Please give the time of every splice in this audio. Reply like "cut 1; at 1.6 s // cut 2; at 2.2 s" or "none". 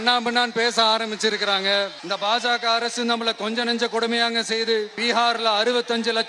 cut 1; at 2.0 s // cut 2; at 4.9 s